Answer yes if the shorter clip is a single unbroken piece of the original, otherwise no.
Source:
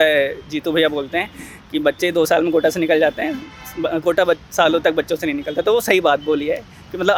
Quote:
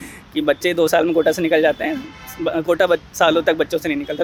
yes